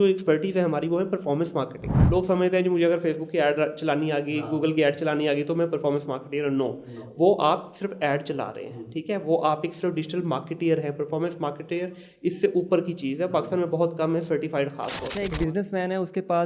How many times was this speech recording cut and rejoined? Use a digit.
2